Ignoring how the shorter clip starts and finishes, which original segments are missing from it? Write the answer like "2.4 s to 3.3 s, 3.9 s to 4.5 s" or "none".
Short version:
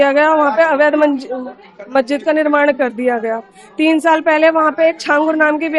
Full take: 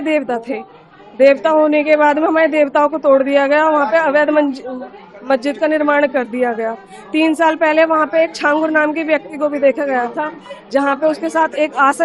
none